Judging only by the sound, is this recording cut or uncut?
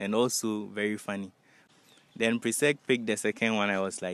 cut